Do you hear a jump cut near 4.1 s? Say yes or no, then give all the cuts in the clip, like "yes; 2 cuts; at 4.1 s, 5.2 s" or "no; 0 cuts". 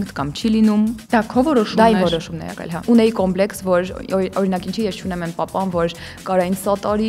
no; 2 cuts; at 1.0 s, 2.8 s